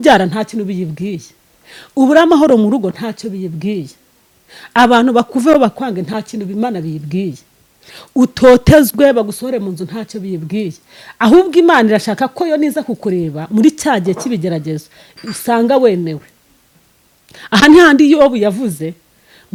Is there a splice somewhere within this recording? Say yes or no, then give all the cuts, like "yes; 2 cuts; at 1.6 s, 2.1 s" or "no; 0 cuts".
no; 0 cuts